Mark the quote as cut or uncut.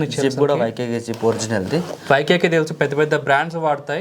uncut